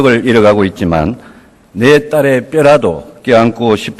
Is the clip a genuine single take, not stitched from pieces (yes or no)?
yes